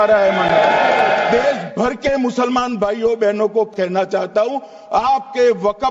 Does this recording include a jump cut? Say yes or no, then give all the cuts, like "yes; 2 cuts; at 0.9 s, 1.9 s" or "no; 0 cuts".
yes; 2 cuts; at 1.3 s, 3.7 s